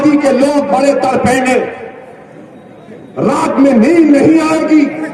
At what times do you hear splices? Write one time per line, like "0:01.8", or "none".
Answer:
none

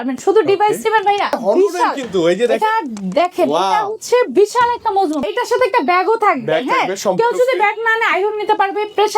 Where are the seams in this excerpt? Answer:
0:01.4
0:05.2

